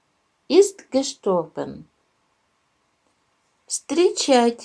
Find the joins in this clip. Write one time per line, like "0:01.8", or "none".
0:02.8